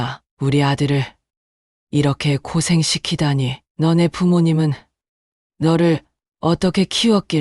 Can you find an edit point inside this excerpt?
yes; 1 cut; at 3.6 s

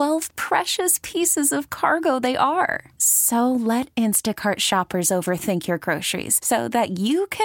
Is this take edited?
no; 0 cuts

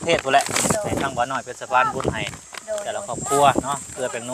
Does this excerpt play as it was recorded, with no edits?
yes; 0 cuts

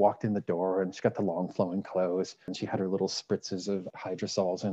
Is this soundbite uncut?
no; 2 cuts; at 2.6 s, 3.9 s

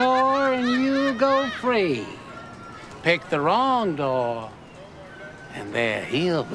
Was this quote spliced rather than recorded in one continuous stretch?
no; 0 cuts

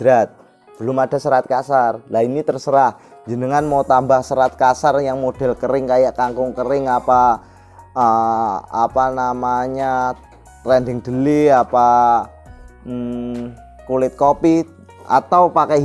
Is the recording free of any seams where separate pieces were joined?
yes; 0 cuts

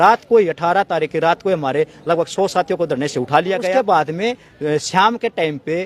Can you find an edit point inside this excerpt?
yes; 1 cut; at 3.7 s

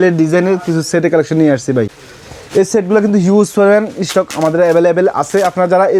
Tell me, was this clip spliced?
no; 0 cuts

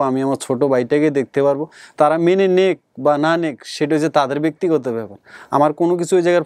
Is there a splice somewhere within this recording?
no; 0 cuts

